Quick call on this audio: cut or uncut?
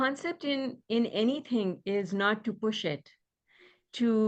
uncut